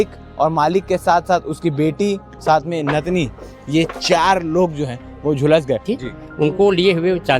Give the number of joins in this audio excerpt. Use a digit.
1